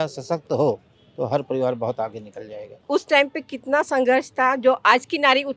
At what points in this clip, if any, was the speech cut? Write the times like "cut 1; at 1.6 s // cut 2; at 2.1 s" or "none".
cut 1; at 2.7 s